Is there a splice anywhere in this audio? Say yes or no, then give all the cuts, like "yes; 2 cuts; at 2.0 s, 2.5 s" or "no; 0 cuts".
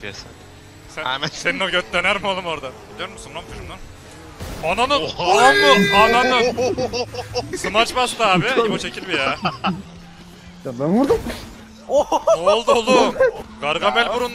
yes; 4 cuts; at 2.9 s, 7.5 s, 9.8 s, 13.5 s